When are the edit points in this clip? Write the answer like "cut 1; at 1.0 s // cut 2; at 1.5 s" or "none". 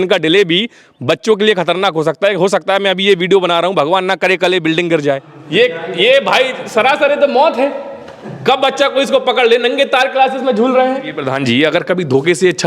cut 1; at 5.3 s // cut 2; at 11.2 s

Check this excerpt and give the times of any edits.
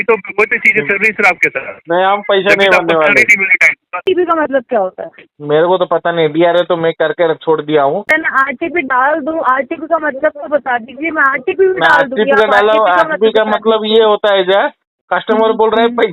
cut 1; at 4.0 s // cut 2; at 8.2 s

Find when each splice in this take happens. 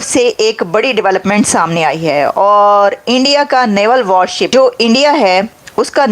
cut 1; at 4.5 s

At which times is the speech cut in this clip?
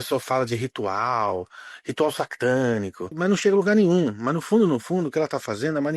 cut 1; at 3.1 s

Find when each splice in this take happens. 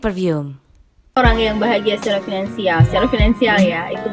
cut 1; at 1.2 s

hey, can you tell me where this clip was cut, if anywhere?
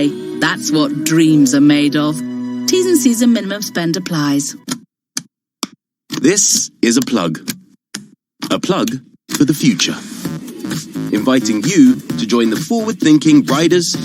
cut 1; at 4.7 s

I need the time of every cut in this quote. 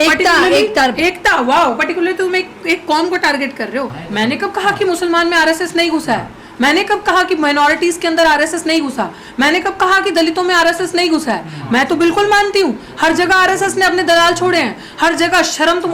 cut 1; at 4.0 s

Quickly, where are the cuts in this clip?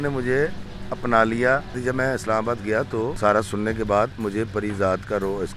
cut 1; at 1.8 s // cut 2; at 3.1 s // cut 3; at 4.2 s

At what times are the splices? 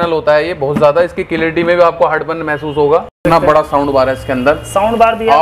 cut 1; at 3.2 s

